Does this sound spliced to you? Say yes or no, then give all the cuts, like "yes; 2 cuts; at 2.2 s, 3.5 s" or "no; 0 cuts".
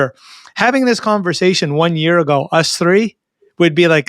no; 0 cuts